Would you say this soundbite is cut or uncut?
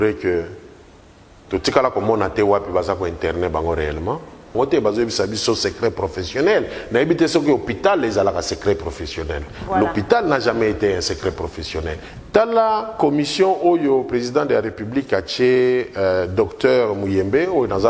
cut